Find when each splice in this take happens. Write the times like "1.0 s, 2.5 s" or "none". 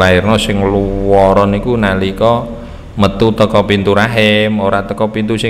none